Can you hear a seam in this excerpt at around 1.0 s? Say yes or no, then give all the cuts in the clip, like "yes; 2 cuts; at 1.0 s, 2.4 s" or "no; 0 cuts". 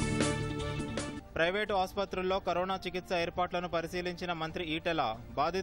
yes; 1 cut; at 1.0 s